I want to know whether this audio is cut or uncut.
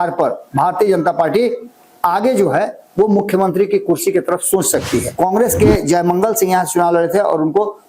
cut